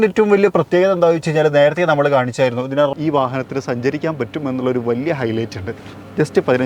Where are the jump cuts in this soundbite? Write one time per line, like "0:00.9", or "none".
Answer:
0:02.9

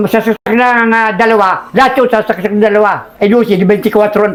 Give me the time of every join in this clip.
none

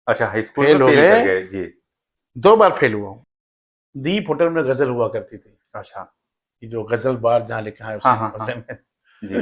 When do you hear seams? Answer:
0:03.2

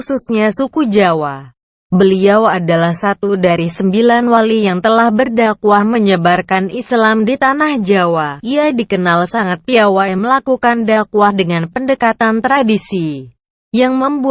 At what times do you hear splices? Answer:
none

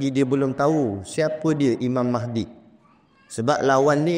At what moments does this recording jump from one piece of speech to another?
none

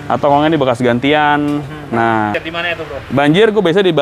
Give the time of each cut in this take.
0:02.4

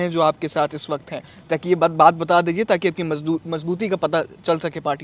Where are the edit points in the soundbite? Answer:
none

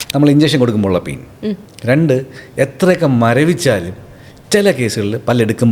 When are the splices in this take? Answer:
none

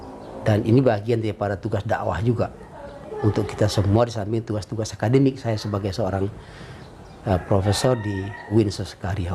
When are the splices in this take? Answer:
0:08.5

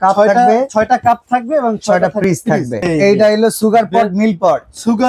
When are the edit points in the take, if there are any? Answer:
0:02.9

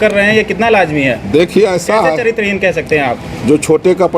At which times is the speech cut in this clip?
0:03.2

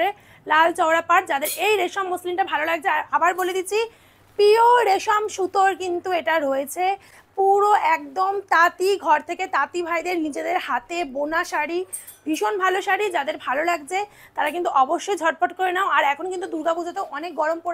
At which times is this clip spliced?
none

